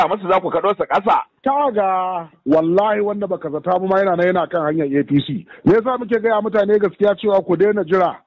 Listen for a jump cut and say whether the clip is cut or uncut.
uncut